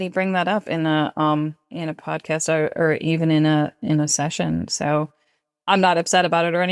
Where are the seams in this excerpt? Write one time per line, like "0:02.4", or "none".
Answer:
0:01.6